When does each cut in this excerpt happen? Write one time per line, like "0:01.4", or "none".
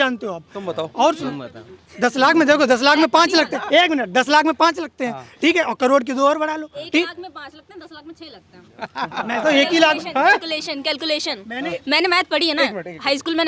none